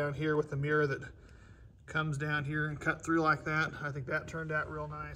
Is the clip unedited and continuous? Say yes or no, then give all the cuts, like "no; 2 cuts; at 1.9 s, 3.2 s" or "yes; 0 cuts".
yes; 0 cuts